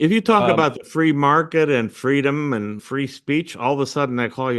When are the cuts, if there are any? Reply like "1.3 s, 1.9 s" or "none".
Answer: 2.8 s